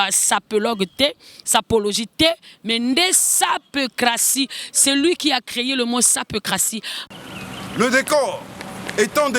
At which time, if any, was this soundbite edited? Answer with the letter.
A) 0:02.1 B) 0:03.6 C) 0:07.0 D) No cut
C